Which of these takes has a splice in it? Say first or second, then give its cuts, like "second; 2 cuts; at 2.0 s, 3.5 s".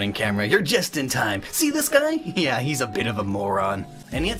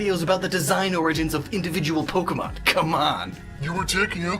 second; 1 cut; at 3.1 s